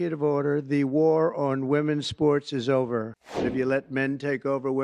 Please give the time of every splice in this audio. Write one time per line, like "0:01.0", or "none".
0:03.4